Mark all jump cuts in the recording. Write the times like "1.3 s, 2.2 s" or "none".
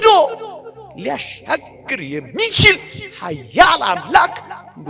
none